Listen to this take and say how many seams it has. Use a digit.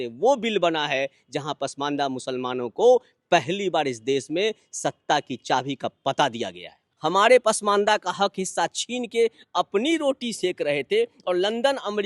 1